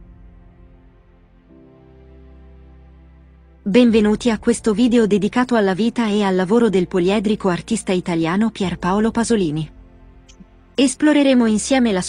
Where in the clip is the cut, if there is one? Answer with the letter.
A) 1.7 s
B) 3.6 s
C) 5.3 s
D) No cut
B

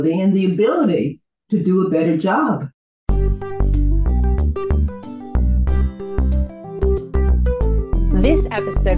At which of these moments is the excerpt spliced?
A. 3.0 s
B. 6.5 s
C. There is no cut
A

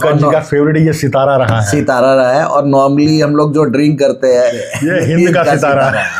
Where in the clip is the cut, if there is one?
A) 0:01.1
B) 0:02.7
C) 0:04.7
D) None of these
C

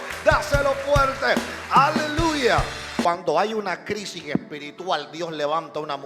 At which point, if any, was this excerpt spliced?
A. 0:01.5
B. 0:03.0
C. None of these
B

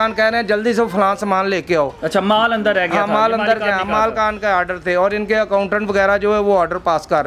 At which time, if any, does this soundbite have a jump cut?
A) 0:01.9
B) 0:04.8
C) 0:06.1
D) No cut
D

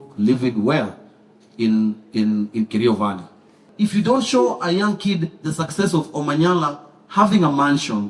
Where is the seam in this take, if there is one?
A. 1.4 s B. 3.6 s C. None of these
B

